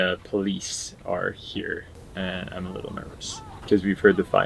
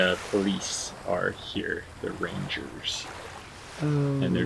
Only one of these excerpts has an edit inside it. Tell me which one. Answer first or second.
first